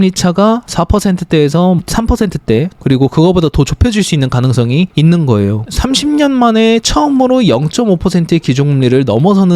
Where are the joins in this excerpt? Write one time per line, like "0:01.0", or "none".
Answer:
0:01.8
0:05.3